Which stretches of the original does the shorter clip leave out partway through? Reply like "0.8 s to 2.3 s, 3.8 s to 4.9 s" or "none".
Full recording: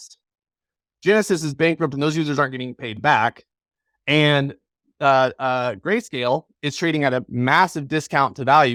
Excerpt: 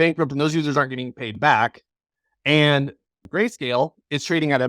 4.9 s to 5.8 s